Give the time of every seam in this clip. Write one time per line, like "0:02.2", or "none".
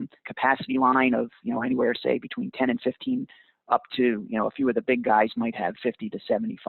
0:05.8

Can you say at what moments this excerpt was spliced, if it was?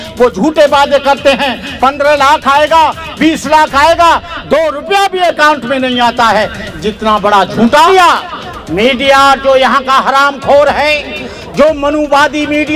0:07.9

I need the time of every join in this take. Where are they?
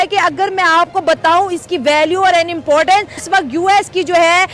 0:03.2

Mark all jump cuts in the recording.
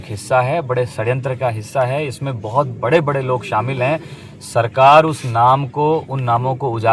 none

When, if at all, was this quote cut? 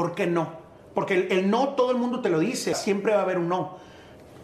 0:02.8

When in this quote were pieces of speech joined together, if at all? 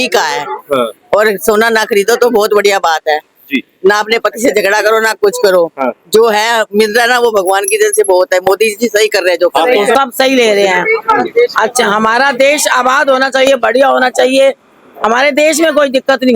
0:09.9

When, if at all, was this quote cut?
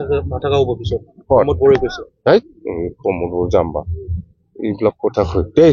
none

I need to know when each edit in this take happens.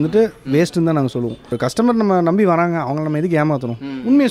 0:01.5

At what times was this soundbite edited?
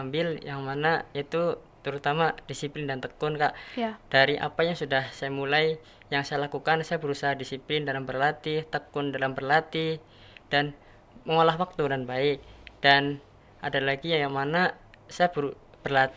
none

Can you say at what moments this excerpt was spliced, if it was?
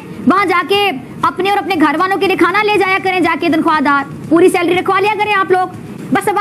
none

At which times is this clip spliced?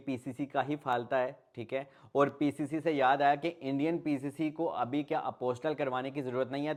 none

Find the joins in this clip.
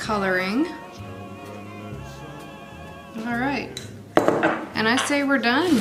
none

